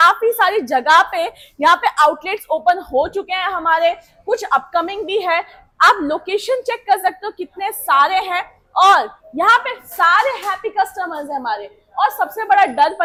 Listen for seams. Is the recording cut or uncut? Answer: uncut